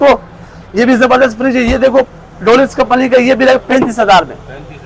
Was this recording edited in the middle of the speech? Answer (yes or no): no